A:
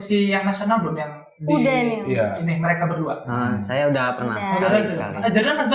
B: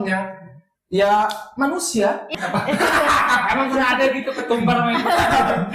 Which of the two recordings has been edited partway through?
B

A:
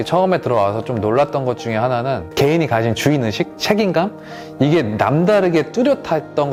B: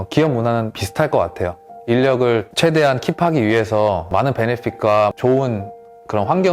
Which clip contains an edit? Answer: B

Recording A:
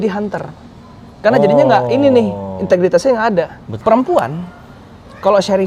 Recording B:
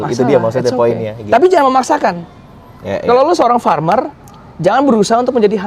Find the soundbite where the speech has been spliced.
A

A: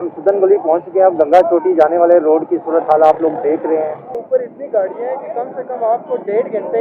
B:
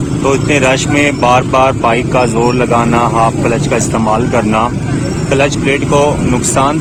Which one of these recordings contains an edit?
A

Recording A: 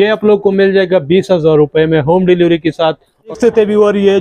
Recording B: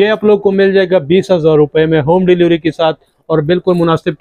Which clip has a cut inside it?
A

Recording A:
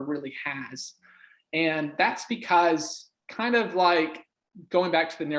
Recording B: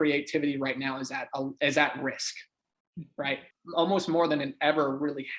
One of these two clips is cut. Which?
B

